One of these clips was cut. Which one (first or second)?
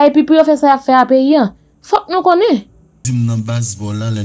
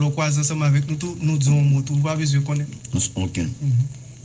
first